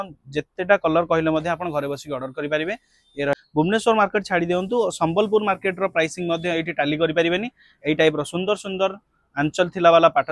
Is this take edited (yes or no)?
yes